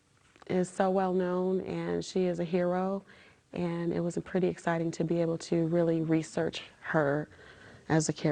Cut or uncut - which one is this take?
uncut